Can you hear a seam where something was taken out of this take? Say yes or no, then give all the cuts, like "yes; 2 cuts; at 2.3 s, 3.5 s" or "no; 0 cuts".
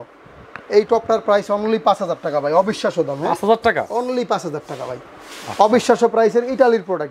no; 0 cuts